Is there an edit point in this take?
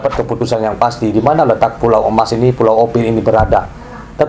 no; 0 cuts

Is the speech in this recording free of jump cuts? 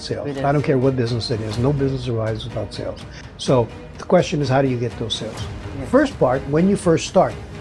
yes; 0 cuts

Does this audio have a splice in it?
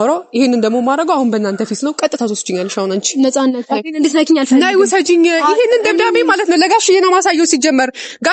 no; 0 cuts

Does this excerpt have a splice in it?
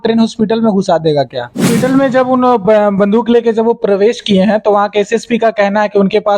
yes; 1 cut; at 1.7 s

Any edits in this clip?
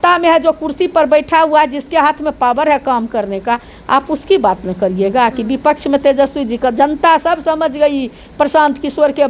no; 0 cuts

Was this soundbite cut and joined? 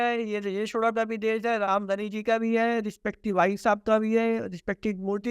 no; 0 cuts

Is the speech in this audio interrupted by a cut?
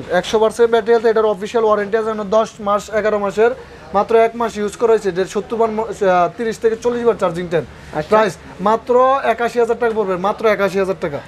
no; 0 cuts

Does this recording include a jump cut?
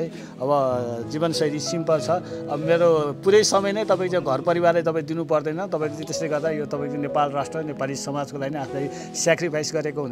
no; 0 cuts

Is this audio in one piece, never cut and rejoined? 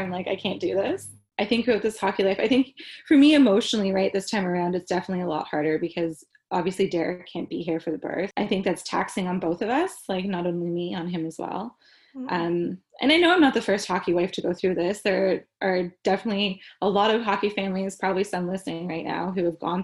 no; 2 cuts; at 1.2 s, 8.3 s

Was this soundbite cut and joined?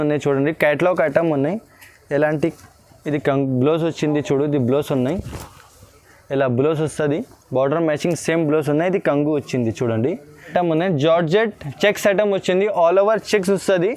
yes; 1 cut; at 10.5 s

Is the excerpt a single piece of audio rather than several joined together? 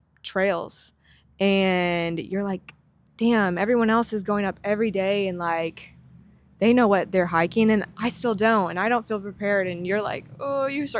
yes; 0 cuts

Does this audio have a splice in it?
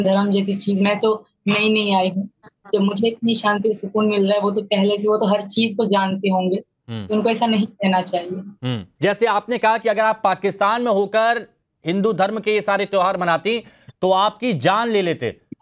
yes; 1 cut; at 8.8 s

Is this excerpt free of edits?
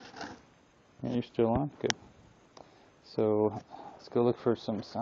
yes; 0 cuts

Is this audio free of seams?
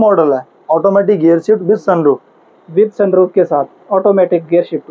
yes; 0 cuts

